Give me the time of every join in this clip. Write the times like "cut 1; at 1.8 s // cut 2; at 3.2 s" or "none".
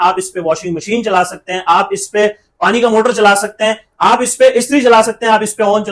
none